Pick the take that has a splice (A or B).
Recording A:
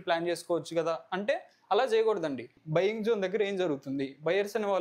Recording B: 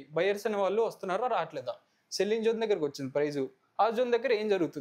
A